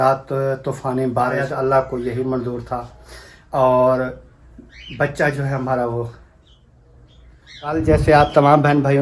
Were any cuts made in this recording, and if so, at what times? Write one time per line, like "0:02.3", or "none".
0:01.5
0:07.8